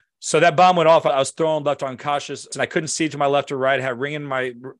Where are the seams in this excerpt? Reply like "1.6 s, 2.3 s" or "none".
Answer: 2.5 s